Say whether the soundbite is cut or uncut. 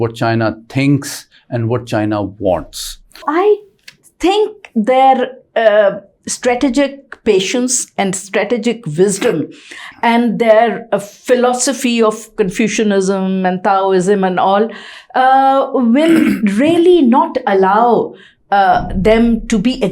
cut